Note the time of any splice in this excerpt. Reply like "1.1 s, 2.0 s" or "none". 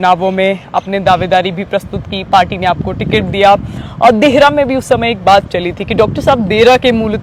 none